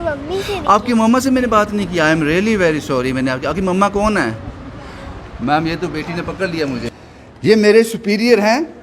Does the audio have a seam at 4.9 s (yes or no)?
no